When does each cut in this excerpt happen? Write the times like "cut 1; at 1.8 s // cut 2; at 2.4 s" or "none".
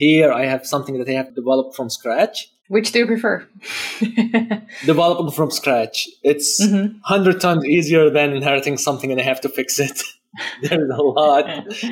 cut 1; at 1.3 s